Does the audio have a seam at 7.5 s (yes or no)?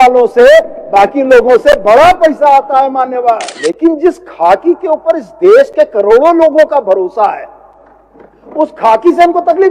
no